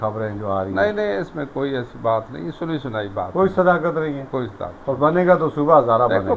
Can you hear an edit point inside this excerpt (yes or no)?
no